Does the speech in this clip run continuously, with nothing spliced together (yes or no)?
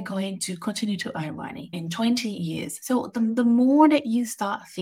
no